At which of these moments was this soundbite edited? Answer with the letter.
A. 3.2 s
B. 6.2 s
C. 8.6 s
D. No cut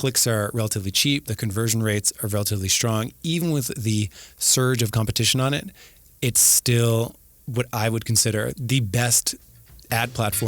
C